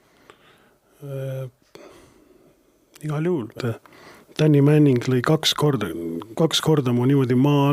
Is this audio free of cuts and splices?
no; 1 cut; at 3.5 s

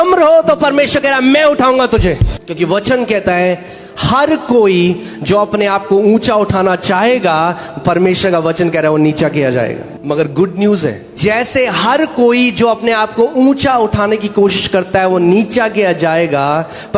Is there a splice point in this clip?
yes; 3 cuts; at 2.3 s, 9.8 s, 11.1 s

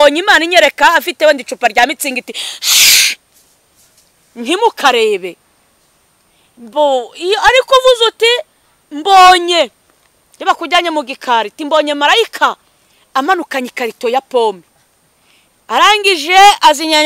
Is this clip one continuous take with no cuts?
yes; 0 cuts

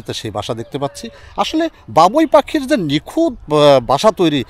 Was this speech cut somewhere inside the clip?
no; 0 cuts

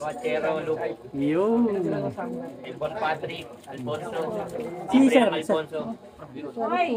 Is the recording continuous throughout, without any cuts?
yes; 0 cuts

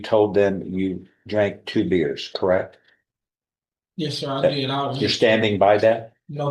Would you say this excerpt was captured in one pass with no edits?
yes; 0 cuts

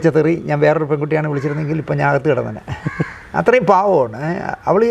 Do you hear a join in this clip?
no; 0 cuts

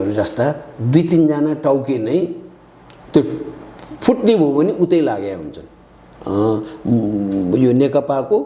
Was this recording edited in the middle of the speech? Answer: no; 0 cuts

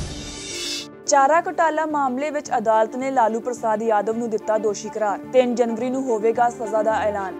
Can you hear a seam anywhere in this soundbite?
yes; 1 cut; at 1.0 s

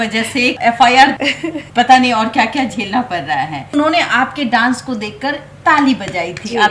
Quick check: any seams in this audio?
yes; 2 cuts; at 1.1 s, 3.7 s

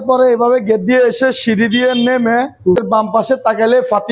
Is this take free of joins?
no; 1 cut; at 3.2 s

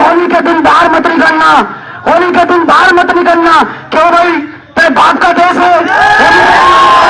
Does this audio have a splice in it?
no; 0 cuts

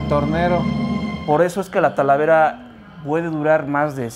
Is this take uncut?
no; 1 cut; at 1.1 s

